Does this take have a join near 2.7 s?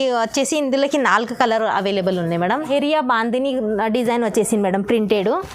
yes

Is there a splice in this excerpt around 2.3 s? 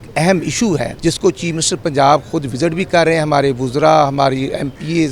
no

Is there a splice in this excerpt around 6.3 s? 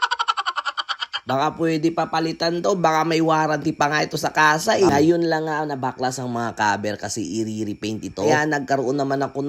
no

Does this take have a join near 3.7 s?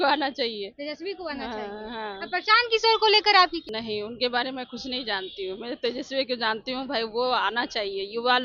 yes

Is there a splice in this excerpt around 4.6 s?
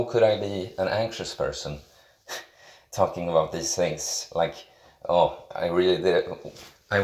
no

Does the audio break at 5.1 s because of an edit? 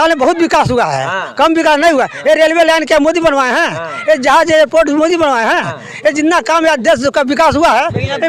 no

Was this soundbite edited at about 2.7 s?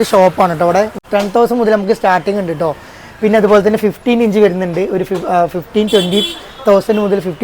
no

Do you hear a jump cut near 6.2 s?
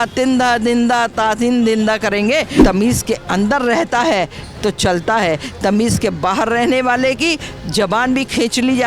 no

